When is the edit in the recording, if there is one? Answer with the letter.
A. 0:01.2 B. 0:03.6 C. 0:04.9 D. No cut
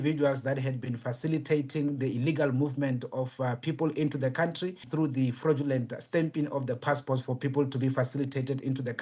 C